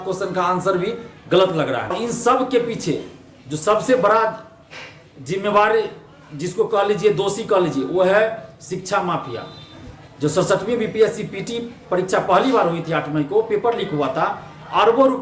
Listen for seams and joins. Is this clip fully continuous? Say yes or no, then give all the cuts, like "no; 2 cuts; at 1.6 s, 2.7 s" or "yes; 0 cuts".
no; 1 cut; at 2.0 s